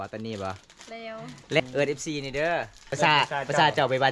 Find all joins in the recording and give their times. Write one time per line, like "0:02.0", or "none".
0:01.6
0:02.9